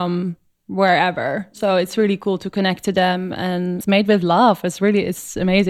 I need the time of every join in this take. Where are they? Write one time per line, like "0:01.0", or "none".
0:03.8